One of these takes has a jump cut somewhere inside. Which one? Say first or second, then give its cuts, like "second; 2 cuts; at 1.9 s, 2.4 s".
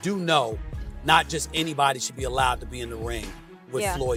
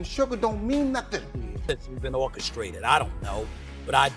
second; 1 cut; at 1.5 s